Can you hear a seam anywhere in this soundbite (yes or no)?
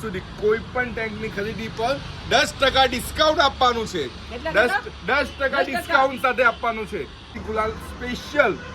yes